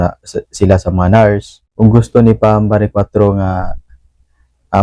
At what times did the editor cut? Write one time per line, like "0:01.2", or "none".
0:01.6